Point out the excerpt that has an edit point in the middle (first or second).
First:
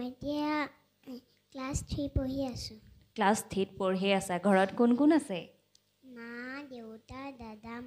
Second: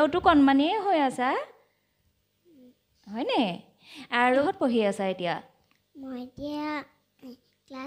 second